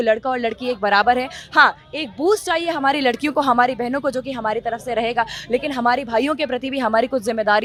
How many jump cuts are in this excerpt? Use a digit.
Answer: 0